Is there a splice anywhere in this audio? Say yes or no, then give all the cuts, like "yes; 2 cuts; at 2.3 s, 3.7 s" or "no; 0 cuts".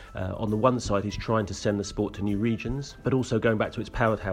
yes; 1 cut; at 2.9 s